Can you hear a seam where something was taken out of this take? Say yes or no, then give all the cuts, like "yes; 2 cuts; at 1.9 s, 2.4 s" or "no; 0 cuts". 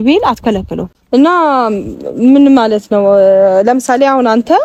no; 0 cuts